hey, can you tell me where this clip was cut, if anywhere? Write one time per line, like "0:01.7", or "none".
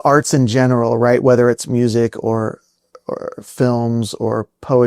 none